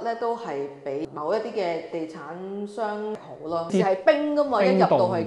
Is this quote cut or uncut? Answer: cut